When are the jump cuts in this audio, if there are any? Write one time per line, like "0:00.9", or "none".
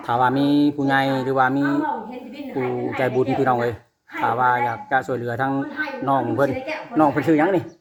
none